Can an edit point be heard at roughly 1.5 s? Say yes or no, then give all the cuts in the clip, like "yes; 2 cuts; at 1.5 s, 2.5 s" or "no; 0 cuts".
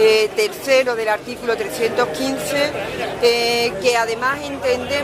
yes; 1 cut; at 1.5 s